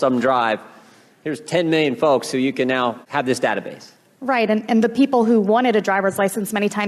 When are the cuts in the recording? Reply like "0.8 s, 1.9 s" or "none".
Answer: 3.0 s